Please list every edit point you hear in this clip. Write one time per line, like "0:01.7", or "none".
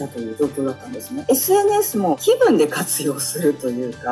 none